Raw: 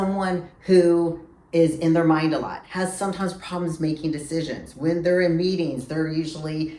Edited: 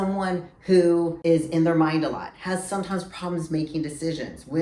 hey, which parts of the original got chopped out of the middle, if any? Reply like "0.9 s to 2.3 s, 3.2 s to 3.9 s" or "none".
1.1 s to 1.4 s